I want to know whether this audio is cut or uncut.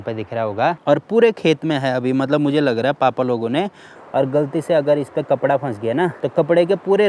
cut